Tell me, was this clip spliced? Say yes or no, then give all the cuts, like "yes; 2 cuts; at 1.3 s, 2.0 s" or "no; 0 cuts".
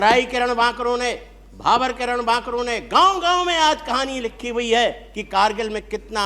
no; 0 cuts